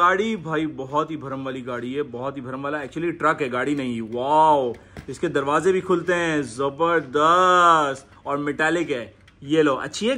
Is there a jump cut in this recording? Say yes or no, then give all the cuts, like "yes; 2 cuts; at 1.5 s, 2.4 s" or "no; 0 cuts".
no; 0 cuts